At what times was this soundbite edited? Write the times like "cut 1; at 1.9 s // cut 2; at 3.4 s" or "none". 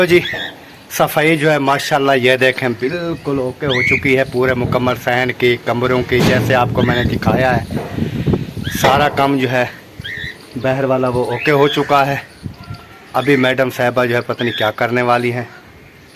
none